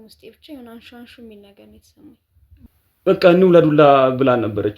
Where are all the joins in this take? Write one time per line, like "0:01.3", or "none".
0:02.7